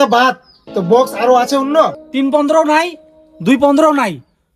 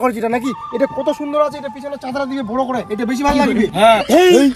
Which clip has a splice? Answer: first; 1 cut; at 2.0 s

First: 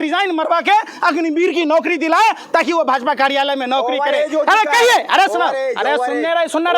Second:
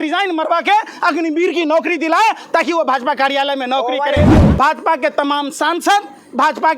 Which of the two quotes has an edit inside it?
second; 1 cut; at 4.4 s

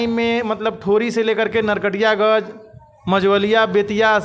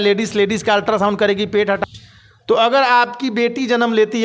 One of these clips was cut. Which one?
second; 1 cut; at 1.8 s

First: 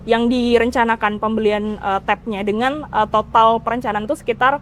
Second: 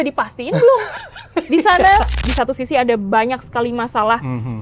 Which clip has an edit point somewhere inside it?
second; 1 cut; at 2.2 s

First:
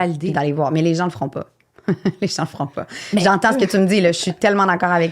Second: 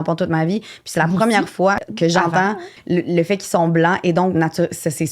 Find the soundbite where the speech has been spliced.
second; 2 cuts; at 1.9 s, 2.7 s

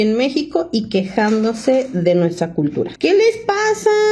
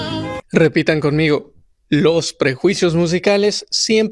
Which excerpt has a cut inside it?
first; 1 cut; at 2.9 s

